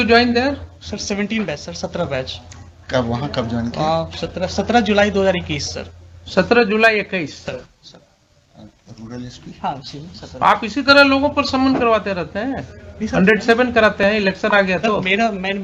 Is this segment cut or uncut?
uncut